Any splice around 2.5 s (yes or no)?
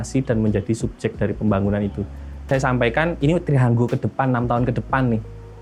yes